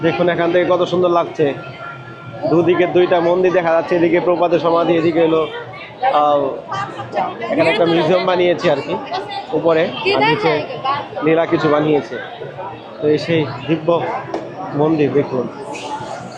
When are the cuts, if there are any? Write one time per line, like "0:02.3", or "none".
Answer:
none